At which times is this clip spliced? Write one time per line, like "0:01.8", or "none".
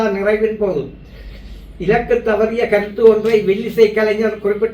none